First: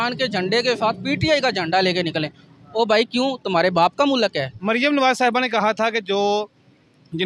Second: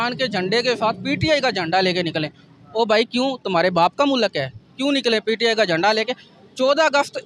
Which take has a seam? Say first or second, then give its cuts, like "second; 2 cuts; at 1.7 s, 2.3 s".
first; 1 cut; at 4.5 s